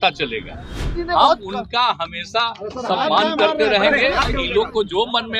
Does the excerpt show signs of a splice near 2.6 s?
no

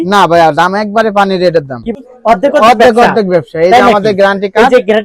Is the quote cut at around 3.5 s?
no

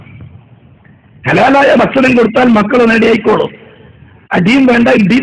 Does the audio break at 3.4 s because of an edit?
yes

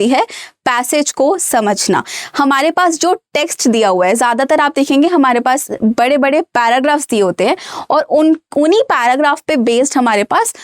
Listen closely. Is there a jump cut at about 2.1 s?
no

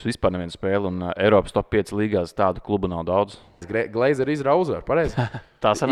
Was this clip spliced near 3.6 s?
yes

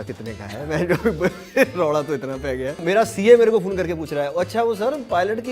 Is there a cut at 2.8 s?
yes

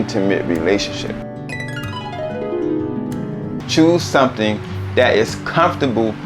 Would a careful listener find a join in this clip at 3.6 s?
yes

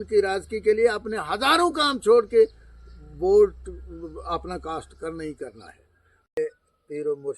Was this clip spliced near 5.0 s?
no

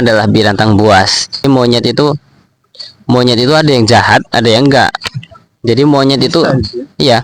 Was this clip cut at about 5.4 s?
no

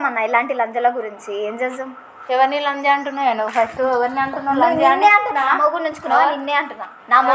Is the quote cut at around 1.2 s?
yes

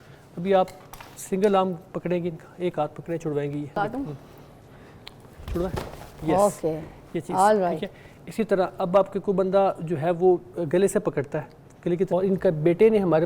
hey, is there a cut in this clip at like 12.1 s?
yes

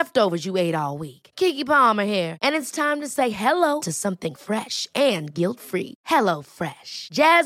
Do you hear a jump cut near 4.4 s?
no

